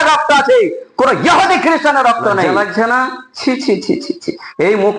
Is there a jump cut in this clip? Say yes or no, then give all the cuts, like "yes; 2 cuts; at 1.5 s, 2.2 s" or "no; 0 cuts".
yes; 1 cut; at 2.5 s